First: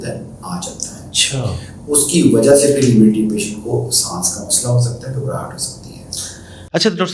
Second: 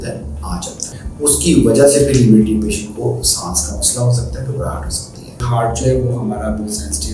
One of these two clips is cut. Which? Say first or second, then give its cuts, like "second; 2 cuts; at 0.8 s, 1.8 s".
second; 2 cuts; at 1.0 s, 5.4 s